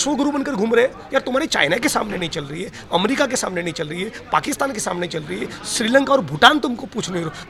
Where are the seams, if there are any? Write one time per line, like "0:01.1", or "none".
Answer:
none